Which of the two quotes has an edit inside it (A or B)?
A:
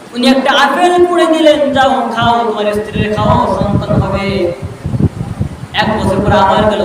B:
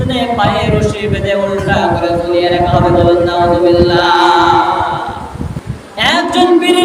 B